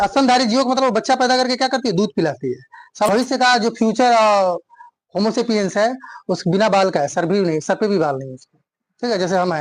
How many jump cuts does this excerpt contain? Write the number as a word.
one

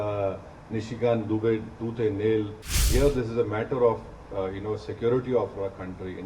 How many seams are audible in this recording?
one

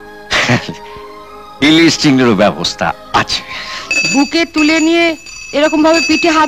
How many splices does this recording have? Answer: one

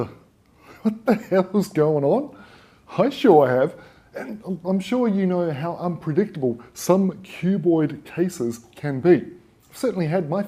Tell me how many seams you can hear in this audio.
one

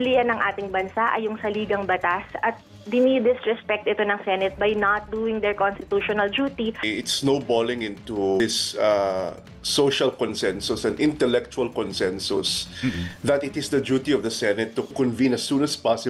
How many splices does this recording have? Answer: three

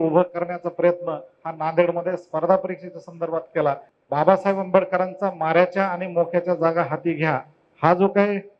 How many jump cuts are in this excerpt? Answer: one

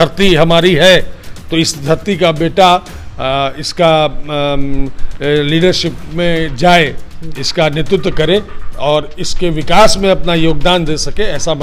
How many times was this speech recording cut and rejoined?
zero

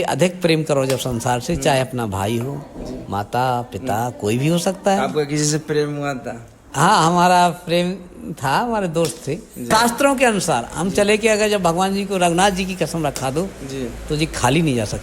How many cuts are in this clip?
one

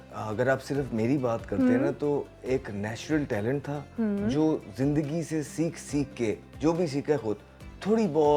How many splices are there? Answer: zero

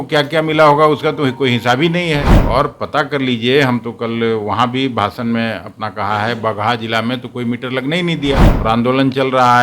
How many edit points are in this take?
two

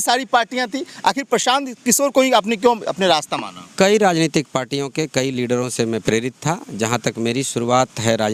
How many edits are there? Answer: zero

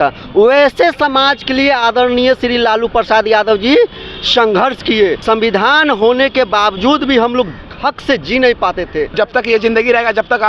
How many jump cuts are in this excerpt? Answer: two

